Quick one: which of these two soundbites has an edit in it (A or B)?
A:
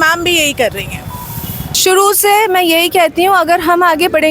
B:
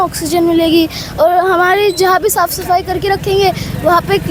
A